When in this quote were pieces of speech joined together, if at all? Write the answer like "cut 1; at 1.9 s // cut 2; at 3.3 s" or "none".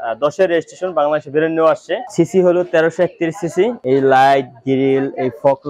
cut 1; at 2.0 s // cut 2; at 3.8 s